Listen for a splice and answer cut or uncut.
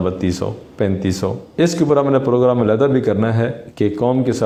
uncut